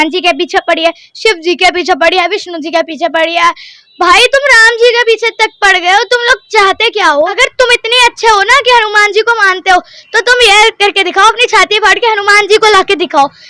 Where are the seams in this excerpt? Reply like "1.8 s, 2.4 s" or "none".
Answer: 7.3 s